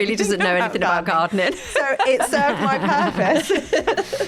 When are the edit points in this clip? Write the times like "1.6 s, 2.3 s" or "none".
none

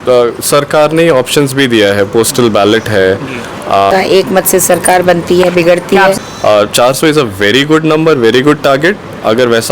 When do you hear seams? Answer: 3.9 s, 6.2 s

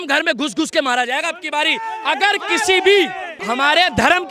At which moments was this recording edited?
3.3 s

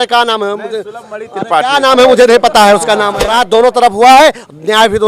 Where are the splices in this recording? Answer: 3.2 s

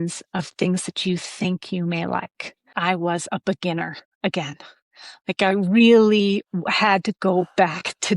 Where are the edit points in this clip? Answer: 2.8 s

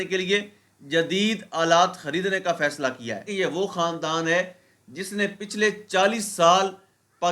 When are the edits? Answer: 3.3 s

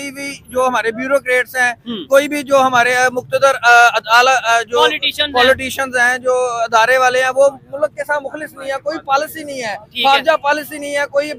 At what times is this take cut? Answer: none

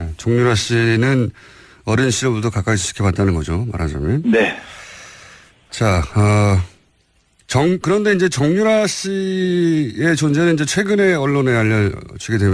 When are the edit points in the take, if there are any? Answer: 1.9 s

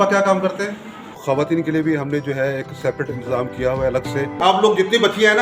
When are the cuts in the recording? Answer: 1.2 s, 4.4 s

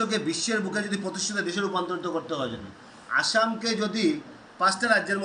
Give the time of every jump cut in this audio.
none

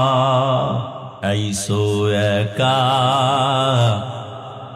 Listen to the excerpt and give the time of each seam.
1.0 s

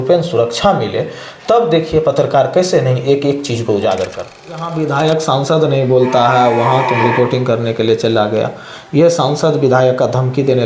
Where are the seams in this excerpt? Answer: 4.6 s

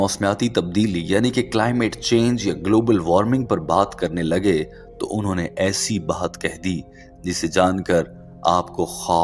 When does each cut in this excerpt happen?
none

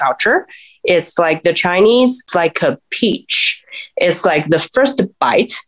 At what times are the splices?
2.2 s

